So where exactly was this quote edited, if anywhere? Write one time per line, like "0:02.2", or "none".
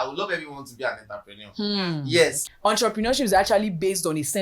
0:02.4